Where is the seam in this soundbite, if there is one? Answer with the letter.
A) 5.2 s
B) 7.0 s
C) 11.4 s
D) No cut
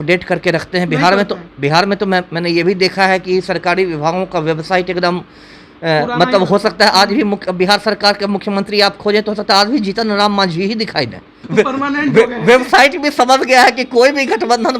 C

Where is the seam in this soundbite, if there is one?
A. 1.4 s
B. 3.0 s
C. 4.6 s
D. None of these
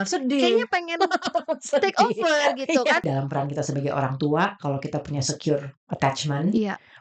B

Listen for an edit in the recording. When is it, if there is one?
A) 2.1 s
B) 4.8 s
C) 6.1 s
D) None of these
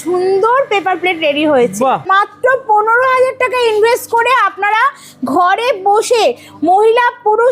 A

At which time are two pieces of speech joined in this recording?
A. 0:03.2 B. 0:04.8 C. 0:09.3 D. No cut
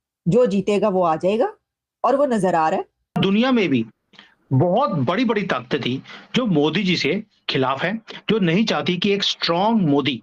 A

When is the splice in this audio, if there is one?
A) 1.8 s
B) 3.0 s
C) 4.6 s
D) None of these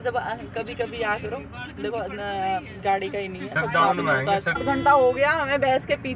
C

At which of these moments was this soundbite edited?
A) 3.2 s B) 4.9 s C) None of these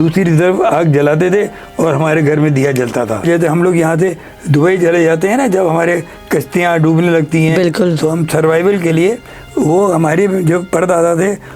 A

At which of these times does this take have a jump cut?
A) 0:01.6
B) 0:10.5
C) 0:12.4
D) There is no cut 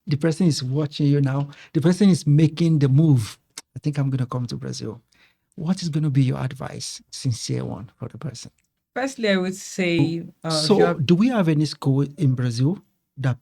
B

